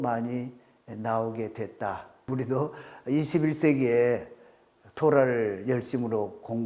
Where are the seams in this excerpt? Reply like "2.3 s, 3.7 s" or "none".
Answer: 2.2 s